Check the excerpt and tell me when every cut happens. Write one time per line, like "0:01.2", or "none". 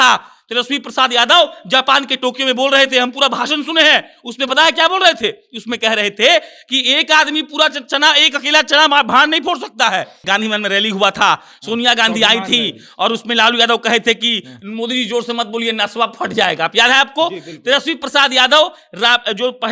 0:10.2